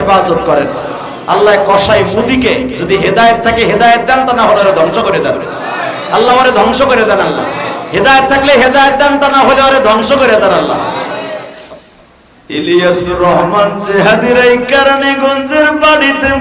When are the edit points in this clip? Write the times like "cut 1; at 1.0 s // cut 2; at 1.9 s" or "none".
cut 1; at 11.5 s